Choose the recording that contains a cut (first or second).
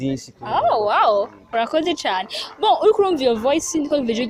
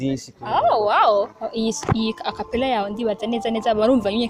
second